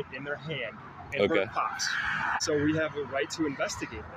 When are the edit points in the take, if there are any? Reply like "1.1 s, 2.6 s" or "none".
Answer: 2.3 s

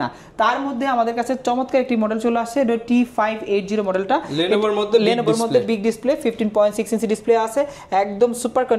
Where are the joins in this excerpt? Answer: none

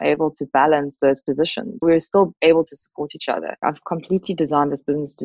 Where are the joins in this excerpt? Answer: 3.5 s

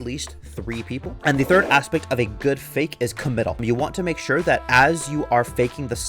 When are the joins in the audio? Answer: 1.1 s

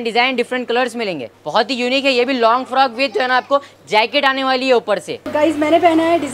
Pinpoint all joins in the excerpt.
1.3 s, 5.2 s

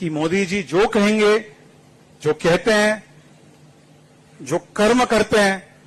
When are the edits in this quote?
none

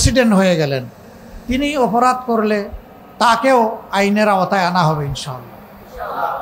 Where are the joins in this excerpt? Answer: none

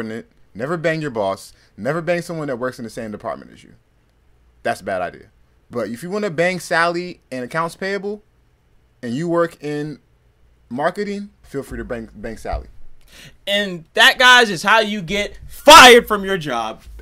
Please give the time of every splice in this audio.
11.4 s

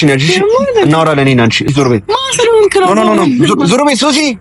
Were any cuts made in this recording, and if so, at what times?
1.7 s

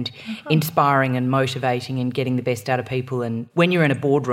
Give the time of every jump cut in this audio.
3.4 s

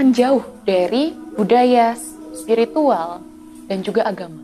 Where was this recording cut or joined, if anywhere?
1.2 s

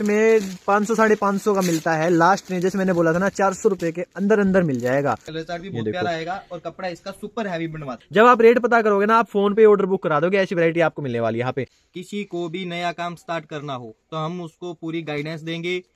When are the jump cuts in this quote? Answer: 5.3 s, 7.9 s, 11.7 s

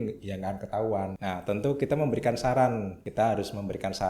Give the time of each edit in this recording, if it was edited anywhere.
1.2 s, 3.0 s

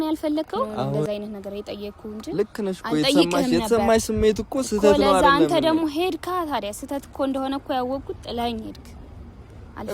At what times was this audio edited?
1.1 s

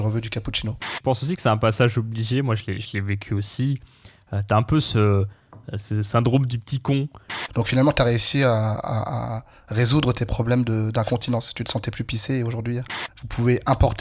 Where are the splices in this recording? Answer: 0.9 s, 7.4 s, 12.8 s

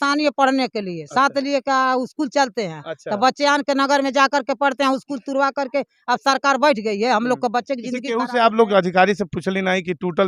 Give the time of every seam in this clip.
none

